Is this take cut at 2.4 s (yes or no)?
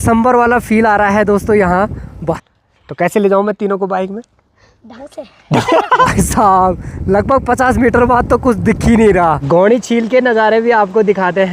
yes